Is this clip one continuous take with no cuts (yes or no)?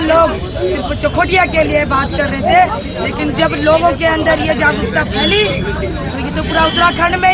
yes